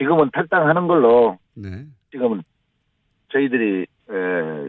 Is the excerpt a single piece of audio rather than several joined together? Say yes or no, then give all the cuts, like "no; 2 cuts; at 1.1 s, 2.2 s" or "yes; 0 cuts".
yes; 0 cuts